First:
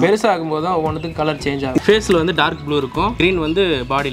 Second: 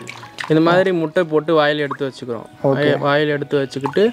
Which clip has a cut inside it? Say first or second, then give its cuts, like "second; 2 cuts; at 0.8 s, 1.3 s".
first; 1 cut; at 1.8 s